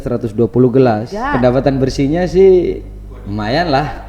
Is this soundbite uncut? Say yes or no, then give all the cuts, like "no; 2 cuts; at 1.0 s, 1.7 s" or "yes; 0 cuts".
no; 1 cut; at 1.1 s